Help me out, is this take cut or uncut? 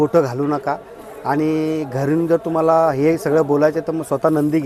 uncut